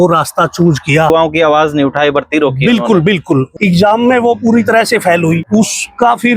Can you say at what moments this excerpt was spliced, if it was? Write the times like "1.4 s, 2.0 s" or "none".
1.1 s, 3.5 s, 5.4 s

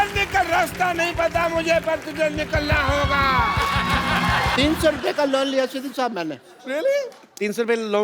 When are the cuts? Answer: 4.5 s

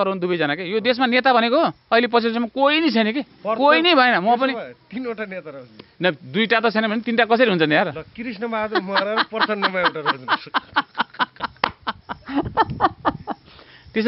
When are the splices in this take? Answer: none

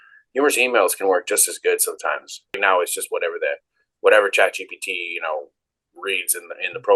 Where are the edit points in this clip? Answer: 2.6 s

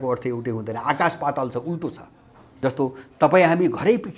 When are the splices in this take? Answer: 2.5 s

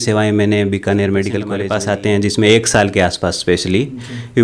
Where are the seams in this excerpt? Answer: 1.6 s

